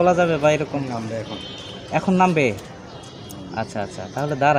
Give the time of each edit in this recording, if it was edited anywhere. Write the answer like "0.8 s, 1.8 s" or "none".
none